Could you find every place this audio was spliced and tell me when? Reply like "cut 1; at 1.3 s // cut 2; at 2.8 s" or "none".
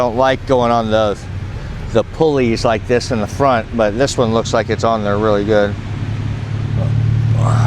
none

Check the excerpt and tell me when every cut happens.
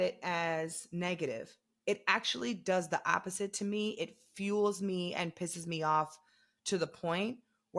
none

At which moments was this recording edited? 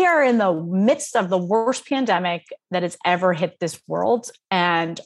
none

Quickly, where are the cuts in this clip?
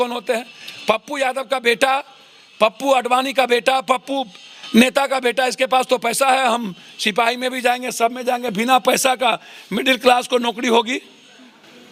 none

